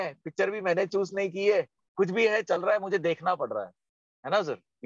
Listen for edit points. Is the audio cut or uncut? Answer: uncut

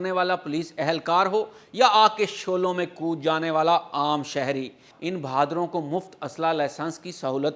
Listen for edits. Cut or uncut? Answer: cut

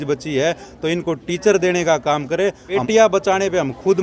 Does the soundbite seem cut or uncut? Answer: cut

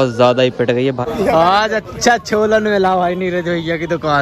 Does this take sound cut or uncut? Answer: cut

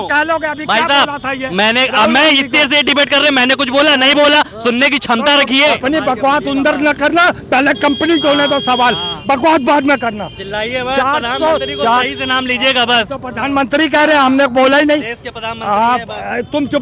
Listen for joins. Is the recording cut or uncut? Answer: cut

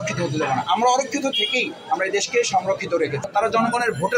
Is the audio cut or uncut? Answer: cut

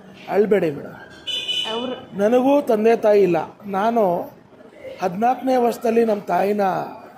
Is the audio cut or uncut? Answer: uncut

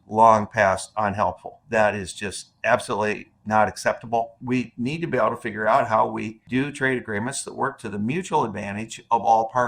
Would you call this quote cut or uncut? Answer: cut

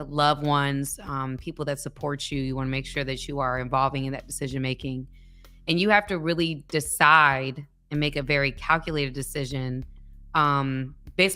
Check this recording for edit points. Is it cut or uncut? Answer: uncut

